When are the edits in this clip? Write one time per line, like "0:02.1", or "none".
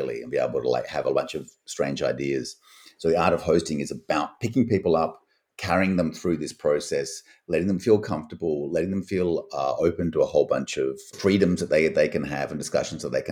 none